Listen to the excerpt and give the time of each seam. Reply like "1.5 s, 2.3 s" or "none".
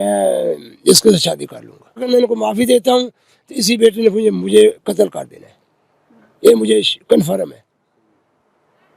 2.1 s